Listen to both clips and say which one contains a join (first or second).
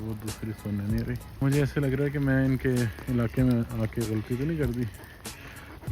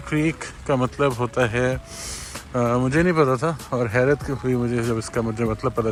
first